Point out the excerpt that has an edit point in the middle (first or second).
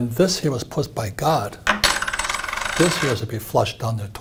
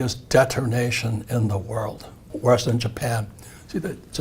second